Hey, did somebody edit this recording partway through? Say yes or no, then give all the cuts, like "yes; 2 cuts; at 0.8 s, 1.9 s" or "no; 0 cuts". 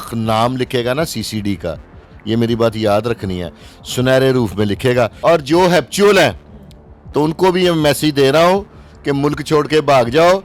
yes; 1 cut; at 5.1 s